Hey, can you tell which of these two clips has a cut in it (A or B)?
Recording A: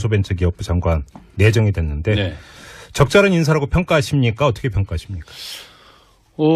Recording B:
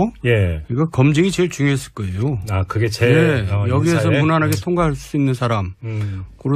B